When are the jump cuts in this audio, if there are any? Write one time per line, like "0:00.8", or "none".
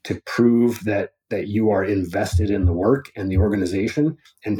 none